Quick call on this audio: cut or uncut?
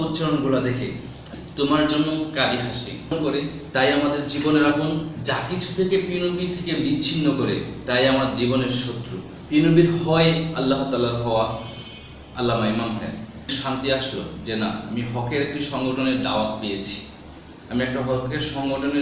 cut